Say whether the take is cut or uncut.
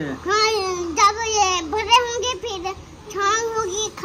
uncut